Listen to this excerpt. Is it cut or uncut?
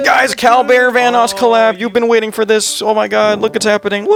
uncut